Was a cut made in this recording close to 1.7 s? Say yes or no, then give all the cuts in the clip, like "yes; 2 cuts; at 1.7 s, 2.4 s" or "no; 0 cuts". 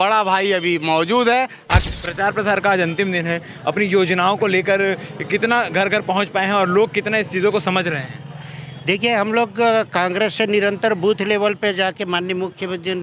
yes; 1 cut; at 1.7 s